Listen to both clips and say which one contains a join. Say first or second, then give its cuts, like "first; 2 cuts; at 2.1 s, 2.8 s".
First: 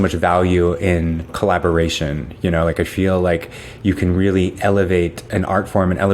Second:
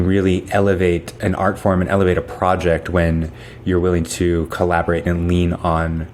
first; 1 cut; at 1.3 s